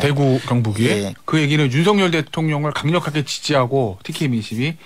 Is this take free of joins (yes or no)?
no